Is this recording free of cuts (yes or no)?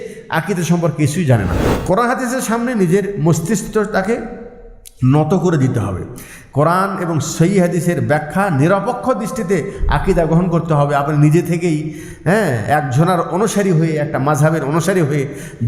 no